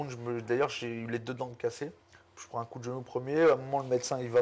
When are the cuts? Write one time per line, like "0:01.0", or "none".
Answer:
0:02.1